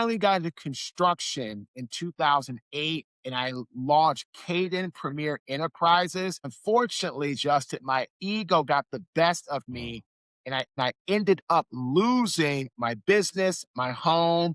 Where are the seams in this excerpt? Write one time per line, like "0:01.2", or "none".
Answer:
0:06.5
0:10.7